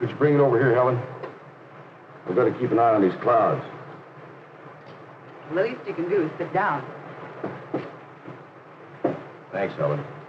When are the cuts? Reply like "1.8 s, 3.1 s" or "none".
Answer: none

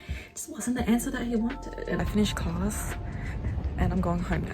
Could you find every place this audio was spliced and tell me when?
2.0 s

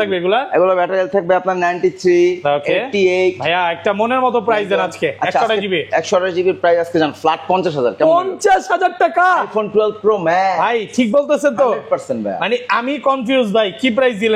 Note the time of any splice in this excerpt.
none

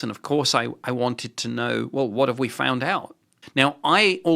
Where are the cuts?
3.4 s

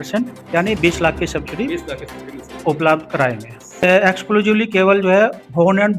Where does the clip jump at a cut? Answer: 3.8 s

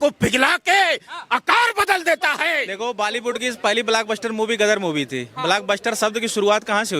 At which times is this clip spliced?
2.7 s

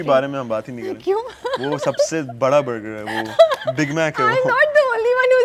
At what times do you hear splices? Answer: none

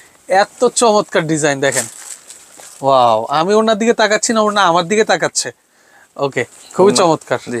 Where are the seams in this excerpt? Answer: none

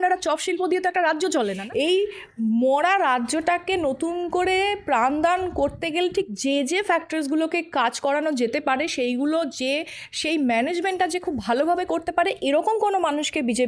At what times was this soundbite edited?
1.6 s

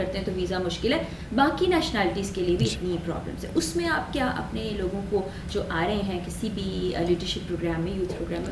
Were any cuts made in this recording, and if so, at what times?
none

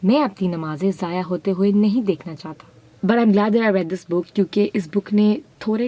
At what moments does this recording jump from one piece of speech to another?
2.9 s

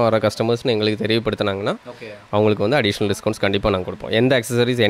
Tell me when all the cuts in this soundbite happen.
none

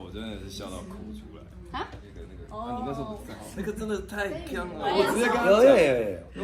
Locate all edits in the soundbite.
2.1 s, 4.9 s

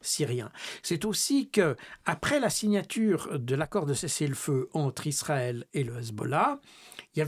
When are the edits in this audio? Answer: none

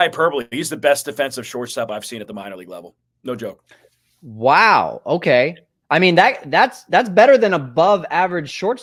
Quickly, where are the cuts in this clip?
none

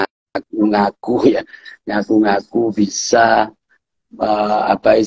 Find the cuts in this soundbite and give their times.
none

